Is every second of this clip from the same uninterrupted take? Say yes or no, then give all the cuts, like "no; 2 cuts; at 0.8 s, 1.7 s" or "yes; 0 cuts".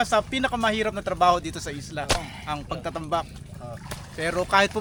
yes; 0 cuts